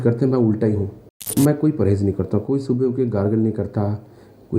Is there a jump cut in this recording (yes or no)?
yes